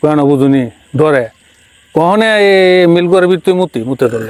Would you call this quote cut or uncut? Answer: uncut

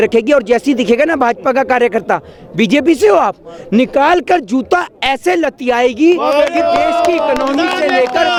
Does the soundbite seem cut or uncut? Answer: uncut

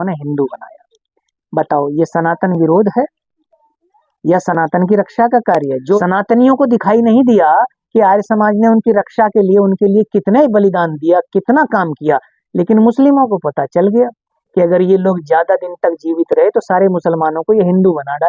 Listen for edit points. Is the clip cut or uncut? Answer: cut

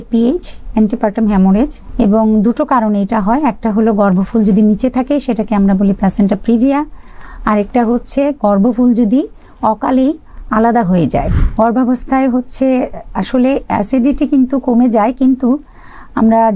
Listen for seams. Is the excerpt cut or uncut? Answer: cut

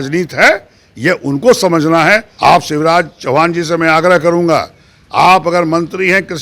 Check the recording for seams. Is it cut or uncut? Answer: cut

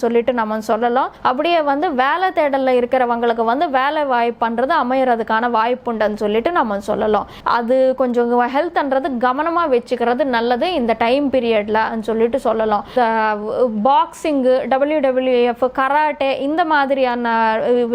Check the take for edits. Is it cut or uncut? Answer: cut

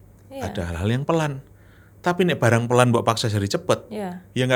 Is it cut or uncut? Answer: uncut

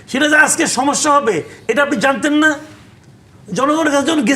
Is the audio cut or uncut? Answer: uncut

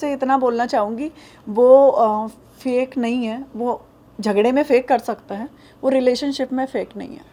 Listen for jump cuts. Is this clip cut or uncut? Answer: uncut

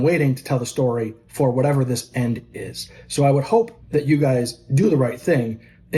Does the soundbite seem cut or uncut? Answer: cut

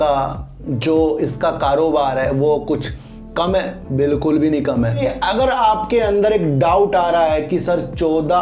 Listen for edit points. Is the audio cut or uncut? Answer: cut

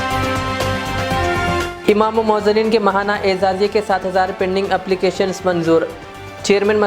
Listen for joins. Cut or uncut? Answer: cut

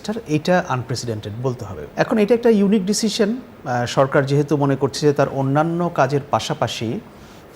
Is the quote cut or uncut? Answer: cut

